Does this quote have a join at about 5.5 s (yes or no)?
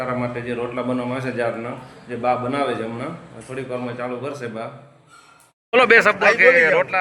yes